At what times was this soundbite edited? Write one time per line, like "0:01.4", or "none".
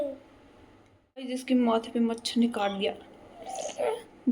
0:01.4